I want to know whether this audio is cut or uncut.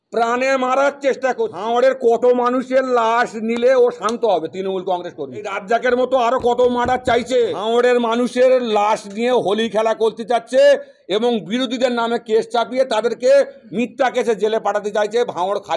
cut